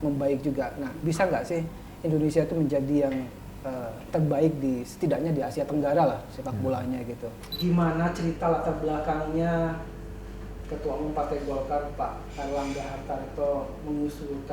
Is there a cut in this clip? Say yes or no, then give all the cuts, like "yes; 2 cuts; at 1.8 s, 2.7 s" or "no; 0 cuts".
yes; 2 cuts; at 1.0 s, 7.4 s